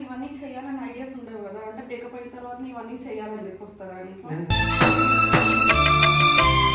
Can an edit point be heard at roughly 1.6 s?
no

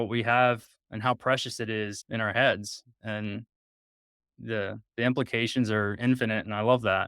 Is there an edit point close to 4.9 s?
no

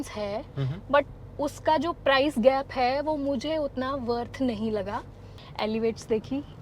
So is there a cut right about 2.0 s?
no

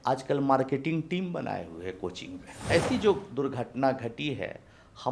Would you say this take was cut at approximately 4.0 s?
no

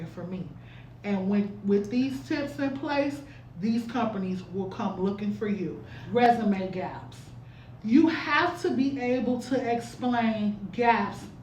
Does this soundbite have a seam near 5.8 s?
yes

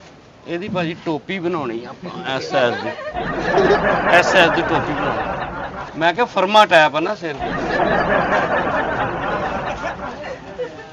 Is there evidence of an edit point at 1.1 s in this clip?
no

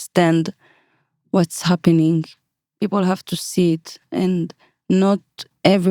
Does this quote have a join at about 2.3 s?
yes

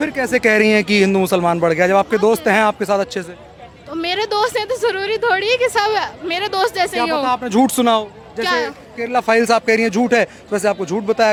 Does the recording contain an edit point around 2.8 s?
no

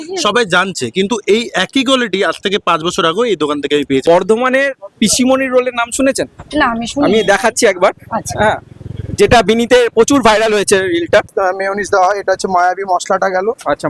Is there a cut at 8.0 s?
no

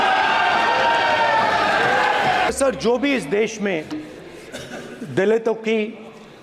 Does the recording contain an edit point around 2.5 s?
yes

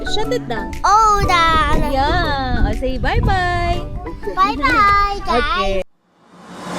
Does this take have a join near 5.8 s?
yes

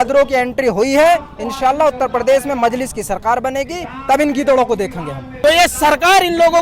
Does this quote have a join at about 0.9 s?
no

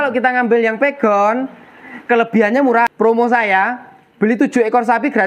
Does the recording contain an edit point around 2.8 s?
yes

